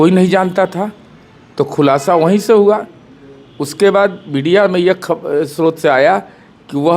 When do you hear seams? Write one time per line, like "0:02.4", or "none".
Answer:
none